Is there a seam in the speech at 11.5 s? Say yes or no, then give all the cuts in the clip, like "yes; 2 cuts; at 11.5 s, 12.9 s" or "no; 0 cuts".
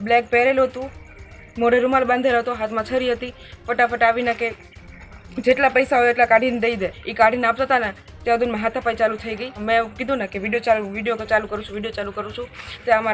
no; 2 cuts; at 7.0 s, 9.6 s